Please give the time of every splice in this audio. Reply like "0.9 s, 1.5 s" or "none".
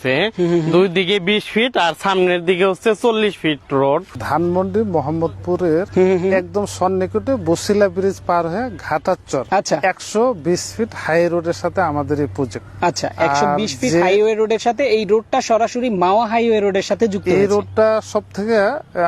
4.1 s, 5.9 s, 9.5 s, 12.6 s